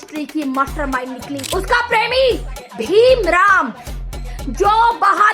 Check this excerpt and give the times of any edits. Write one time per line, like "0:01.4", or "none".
0:01.4